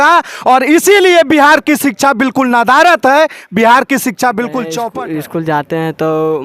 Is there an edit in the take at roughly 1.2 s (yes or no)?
no